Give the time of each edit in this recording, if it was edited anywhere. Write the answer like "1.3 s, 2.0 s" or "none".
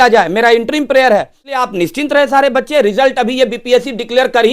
1.5 s

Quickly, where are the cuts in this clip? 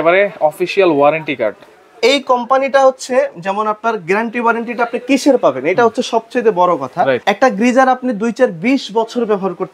none

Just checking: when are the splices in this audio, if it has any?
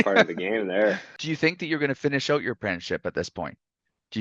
1.1 s

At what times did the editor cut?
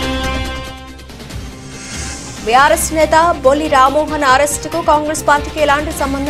1.8 s

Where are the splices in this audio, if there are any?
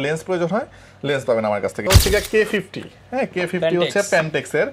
1.9 s

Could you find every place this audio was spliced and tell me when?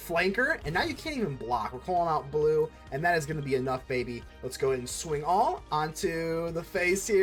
none

